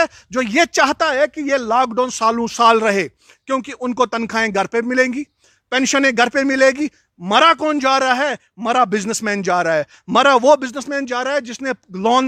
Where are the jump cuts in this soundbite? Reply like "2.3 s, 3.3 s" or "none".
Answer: none